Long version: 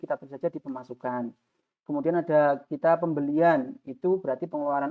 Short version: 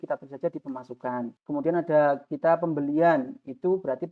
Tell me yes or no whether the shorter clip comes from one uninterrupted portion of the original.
no